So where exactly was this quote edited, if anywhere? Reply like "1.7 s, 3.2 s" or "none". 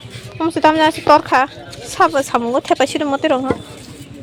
none